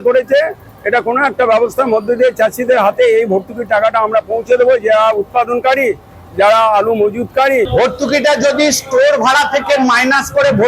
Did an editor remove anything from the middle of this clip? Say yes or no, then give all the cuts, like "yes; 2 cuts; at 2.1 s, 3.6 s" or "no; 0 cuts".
yes; 1 cut; at 7.7 s